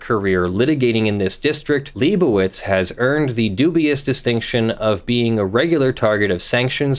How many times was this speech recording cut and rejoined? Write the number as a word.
one